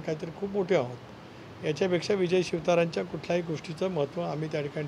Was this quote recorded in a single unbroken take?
yes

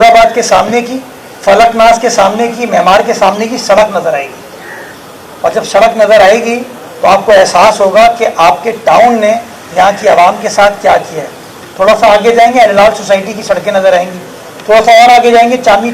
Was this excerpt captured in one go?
yes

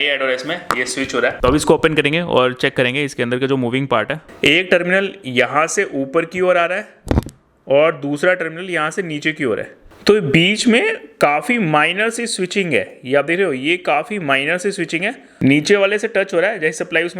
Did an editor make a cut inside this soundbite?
yes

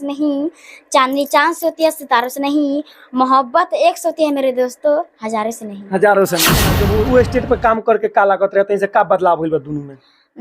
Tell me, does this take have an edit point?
yes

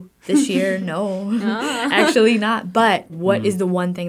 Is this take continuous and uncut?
no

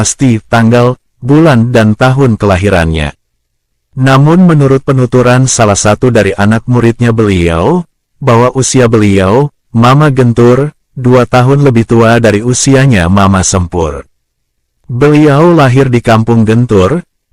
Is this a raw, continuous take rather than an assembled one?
yes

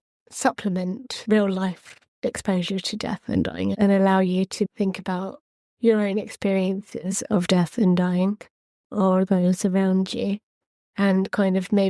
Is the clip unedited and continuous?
no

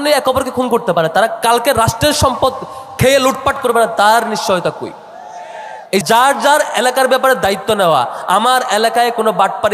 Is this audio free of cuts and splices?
no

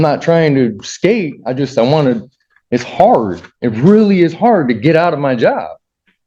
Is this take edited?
no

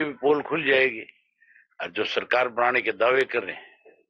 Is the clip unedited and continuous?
yes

